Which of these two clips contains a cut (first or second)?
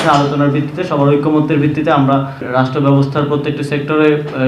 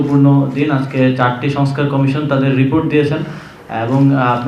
first